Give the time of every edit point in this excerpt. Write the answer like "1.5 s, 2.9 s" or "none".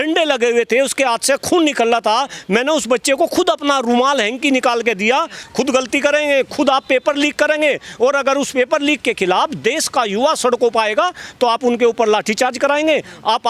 5.4 s